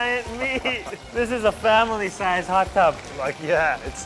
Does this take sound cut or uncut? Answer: uncut